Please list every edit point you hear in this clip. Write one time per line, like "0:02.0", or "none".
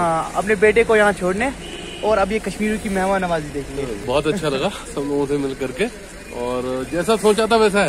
0:04.0

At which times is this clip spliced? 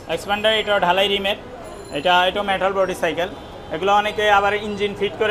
none

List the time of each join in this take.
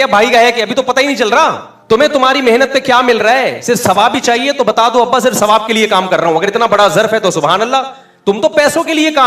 0:01.7

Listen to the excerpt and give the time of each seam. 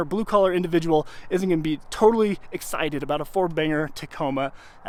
none

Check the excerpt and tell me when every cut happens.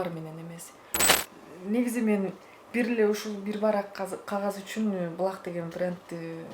0:01.2

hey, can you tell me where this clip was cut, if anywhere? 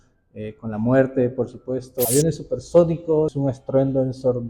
0:02.1
0:03.3

